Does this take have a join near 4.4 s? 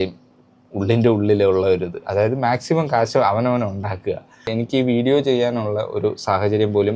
yes; 1 cut; at 4.4 s

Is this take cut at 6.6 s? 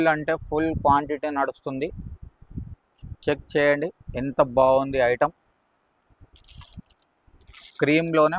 no; 0 cuts

